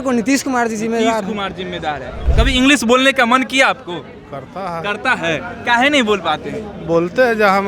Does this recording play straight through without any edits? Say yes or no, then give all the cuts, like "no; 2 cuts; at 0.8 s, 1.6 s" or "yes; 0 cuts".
no; 1 cut; at 2.2 s